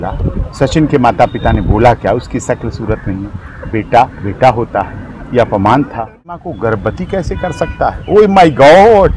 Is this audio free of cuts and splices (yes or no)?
no